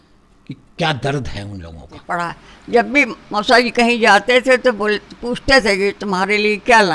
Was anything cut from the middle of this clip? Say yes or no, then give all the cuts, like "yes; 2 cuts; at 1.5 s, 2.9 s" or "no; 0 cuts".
yes; 1 cut; at 2.0 s